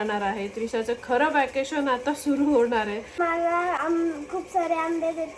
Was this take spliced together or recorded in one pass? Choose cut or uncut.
cut